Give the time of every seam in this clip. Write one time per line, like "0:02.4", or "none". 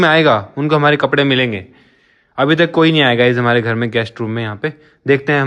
none